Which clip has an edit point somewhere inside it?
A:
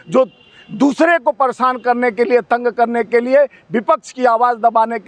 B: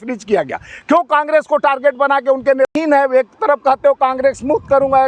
B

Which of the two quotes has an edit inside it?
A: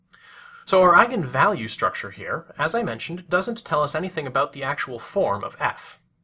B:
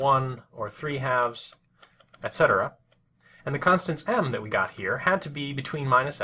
A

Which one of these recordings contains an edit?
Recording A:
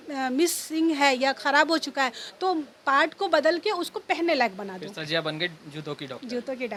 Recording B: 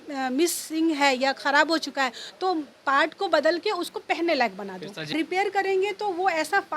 B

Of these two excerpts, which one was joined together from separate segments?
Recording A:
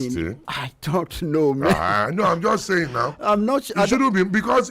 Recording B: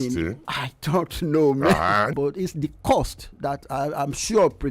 B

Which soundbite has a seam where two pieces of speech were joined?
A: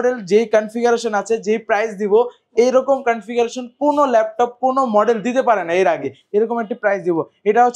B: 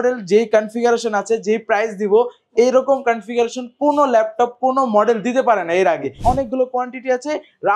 B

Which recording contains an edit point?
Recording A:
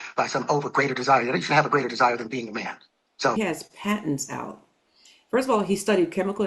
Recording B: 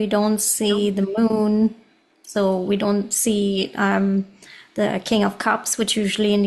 A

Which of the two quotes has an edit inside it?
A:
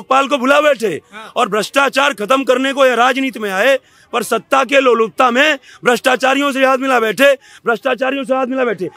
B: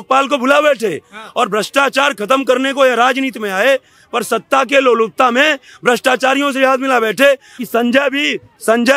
B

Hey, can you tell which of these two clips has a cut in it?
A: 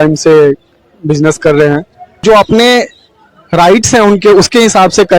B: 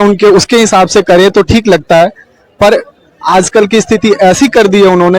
A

